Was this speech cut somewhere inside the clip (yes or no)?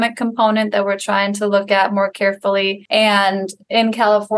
yes